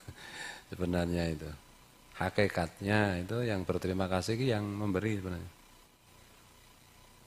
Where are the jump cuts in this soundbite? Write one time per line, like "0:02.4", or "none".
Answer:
0:06.0